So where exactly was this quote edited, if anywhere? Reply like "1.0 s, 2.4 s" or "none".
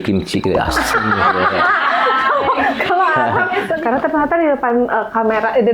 3.7 s

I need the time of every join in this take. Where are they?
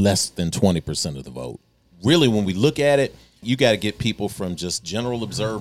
1.8 s, 3.4 s

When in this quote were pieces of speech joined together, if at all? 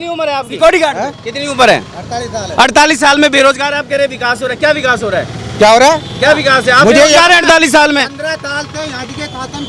none

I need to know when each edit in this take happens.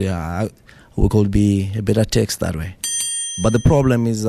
3.0 s

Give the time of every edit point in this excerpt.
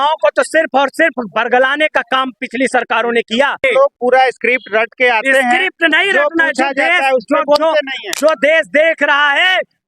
3.6 s

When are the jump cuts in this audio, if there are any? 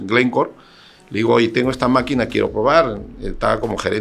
none

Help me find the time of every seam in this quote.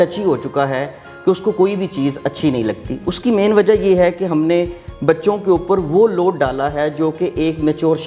none

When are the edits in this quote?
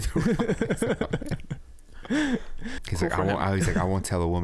2.8 s

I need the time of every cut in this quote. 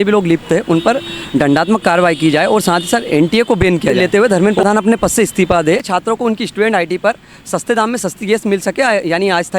4.0 s, 5.8 s

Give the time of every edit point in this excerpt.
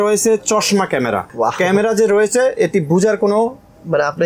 1.3 s

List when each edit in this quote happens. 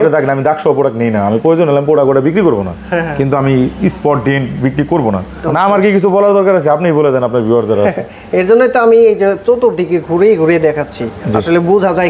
5.3 s

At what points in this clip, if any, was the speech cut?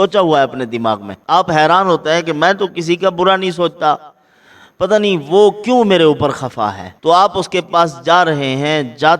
1.1 s, 6.9 s

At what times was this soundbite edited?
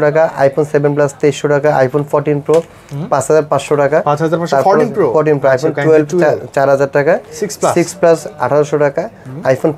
none

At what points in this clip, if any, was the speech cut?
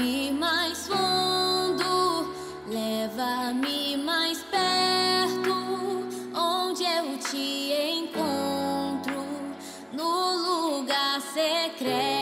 none

